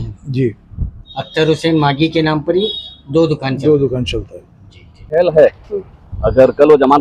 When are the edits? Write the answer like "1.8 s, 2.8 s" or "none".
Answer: none